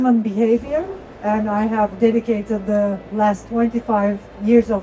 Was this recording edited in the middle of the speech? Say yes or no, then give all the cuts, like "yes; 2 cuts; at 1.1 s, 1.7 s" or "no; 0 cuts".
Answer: no; 0 cuts